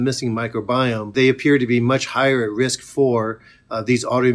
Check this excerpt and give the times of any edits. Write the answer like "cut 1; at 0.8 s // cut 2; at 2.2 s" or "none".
cut 1; at 1.1 s